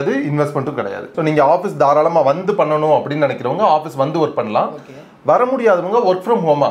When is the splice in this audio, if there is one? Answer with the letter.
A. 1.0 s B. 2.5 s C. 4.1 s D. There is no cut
A